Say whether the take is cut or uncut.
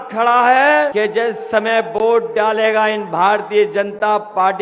cut